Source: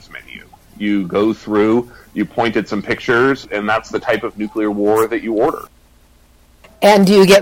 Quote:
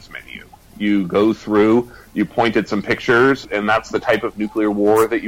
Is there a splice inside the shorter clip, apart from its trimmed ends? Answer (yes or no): no